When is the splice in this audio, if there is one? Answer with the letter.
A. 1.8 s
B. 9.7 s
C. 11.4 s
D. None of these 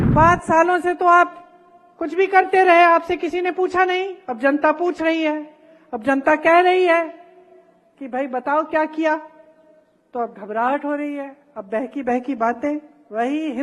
D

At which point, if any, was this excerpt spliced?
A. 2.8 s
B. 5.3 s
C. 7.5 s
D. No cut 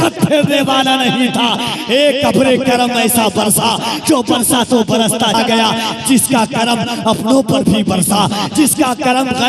B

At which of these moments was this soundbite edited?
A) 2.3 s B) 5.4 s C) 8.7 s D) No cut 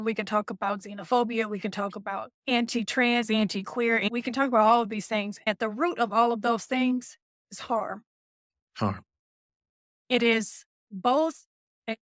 A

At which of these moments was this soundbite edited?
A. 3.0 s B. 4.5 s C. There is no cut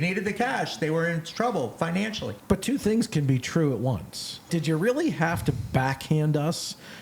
B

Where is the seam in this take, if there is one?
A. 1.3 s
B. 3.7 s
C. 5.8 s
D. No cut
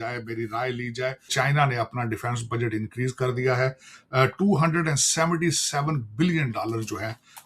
A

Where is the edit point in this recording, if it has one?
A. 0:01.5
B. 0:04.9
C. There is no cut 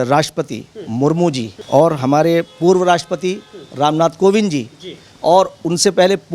A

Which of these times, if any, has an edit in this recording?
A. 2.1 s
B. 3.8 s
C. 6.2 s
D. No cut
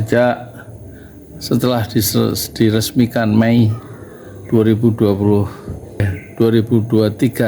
C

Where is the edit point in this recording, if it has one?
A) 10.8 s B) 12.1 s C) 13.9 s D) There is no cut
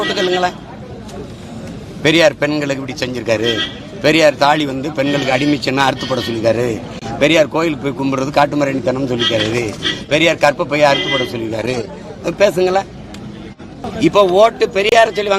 C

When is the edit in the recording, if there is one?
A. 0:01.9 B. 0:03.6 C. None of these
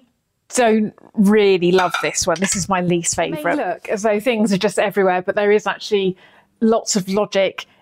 B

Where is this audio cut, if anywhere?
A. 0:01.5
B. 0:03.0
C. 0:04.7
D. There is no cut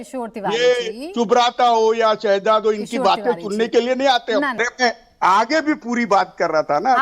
C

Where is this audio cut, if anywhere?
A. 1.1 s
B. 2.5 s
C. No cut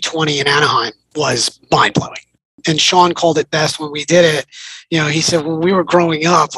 B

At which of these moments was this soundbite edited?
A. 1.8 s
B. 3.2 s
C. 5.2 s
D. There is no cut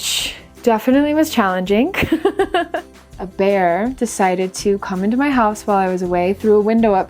B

